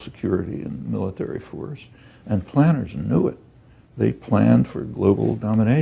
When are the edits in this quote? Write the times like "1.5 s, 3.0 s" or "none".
none